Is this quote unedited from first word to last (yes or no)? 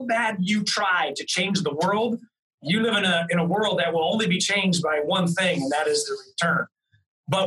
yes